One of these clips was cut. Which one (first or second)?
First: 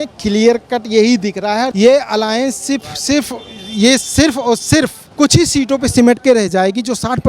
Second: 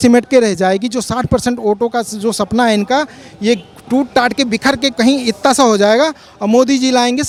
first